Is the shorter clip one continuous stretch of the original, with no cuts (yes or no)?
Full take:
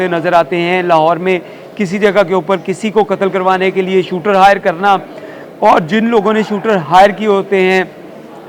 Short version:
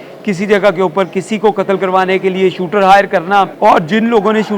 no